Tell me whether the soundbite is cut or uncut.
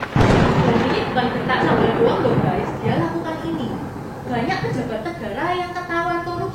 cut